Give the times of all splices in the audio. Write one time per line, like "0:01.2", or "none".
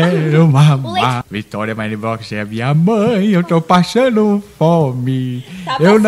0:01.2